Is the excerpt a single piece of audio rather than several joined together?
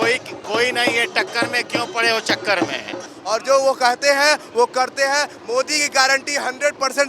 no; 1 cut; at 3.1 s

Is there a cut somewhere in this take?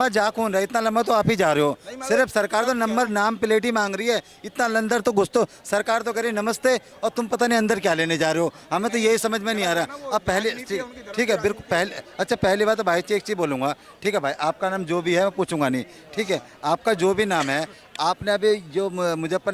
no; 0 cuts

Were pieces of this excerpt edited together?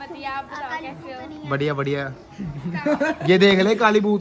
no; 0 cuts

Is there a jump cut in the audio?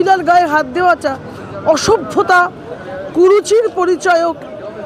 no; 0 cuts

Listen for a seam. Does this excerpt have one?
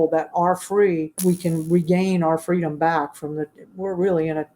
yes; 1 cut; at 1.1 s

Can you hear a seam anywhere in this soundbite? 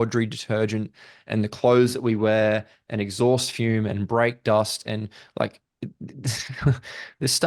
no; 0 cuts

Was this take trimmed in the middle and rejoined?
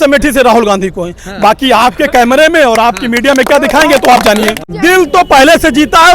yes; 1 cut; at 4.6 s

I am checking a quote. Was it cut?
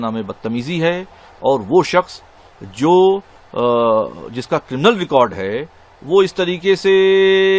no; 0 cuts

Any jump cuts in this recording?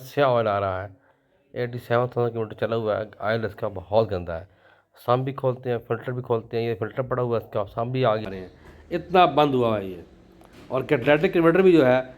yes; 1 cut; at 8.3 s

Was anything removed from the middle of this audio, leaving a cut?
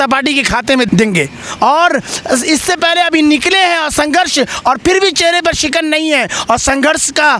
no; 0 cuts

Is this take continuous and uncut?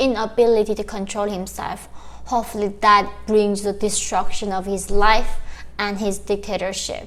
yes; 0 cuts

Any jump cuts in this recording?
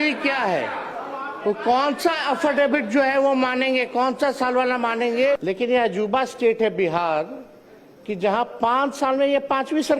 yes; 1 cut; at 5.4 s

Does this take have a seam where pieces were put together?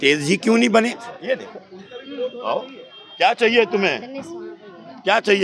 yes; 1 cut; at 1.1 s

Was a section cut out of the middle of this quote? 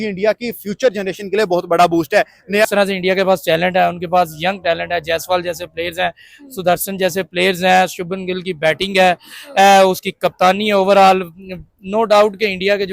yes; 1 cut; at 2.6 s

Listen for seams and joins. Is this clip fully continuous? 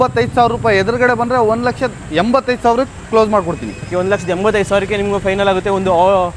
yes; 0 cuts

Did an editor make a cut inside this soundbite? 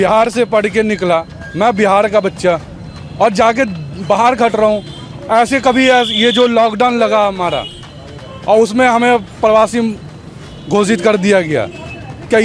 no; 0 cuts

